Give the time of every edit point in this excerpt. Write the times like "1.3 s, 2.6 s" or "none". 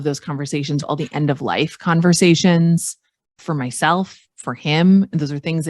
0.8 s, 3.4 s

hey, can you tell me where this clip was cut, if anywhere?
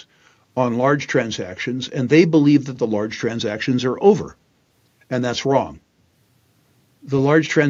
none

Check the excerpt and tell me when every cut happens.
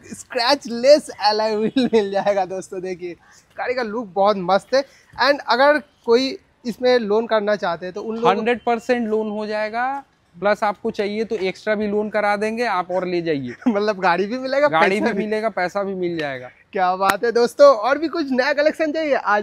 none

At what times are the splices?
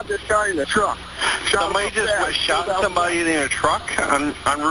none

